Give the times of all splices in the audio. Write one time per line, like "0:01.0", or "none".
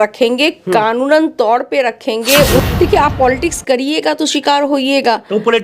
0:02.6